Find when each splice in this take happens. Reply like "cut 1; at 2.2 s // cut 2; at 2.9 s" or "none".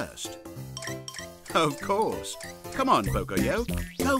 none